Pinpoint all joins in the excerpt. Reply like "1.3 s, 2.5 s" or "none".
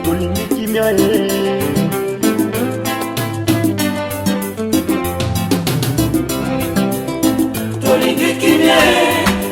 none